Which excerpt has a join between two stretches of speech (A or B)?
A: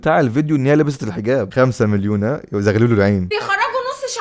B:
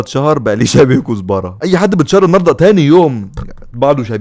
A